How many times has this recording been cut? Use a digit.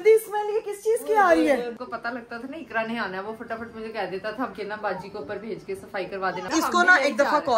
3